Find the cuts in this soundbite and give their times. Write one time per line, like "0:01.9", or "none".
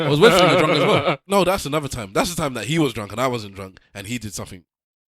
0:01.2